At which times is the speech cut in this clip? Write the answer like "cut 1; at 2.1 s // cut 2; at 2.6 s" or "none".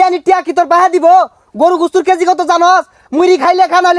none